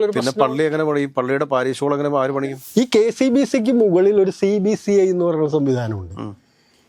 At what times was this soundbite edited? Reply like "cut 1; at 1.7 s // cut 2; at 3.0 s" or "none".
cut 1; at 2.4 s